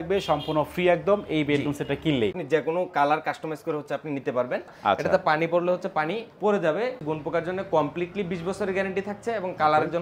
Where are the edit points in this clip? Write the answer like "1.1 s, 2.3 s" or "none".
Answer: 2.4 s, 4.7 s, 7.0 s